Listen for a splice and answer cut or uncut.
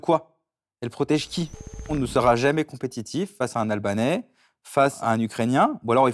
cut